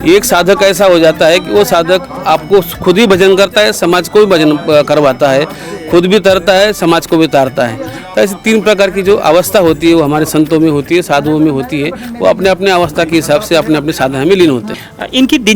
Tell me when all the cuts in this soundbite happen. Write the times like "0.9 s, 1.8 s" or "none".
none